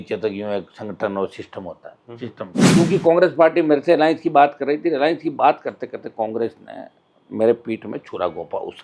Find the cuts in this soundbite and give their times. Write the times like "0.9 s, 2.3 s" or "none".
2.7 s